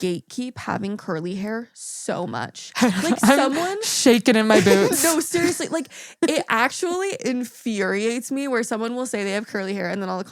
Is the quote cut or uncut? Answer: uncut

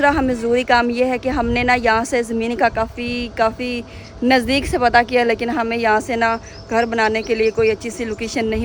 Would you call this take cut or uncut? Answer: uncut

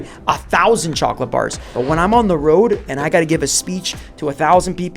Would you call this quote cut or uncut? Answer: cut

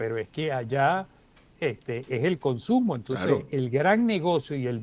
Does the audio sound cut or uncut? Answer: uncut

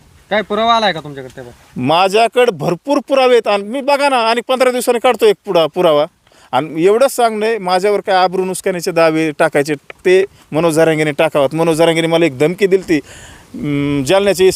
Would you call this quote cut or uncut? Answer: uncut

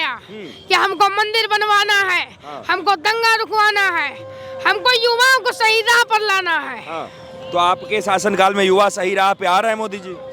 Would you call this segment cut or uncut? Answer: uncut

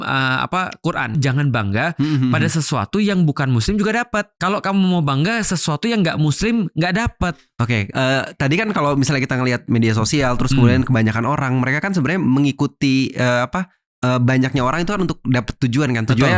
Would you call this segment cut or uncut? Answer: cut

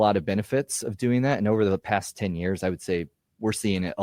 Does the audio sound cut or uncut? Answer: uncut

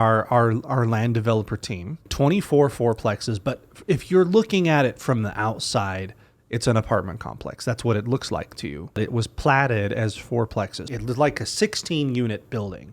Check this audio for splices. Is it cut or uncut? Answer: cut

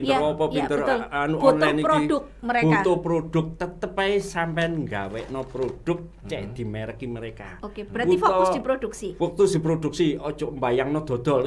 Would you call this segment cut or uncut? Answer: uncut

